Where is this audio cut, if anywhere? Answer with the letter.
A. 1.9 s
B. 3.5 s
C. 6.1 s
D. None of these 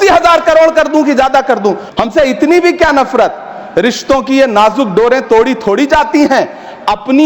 A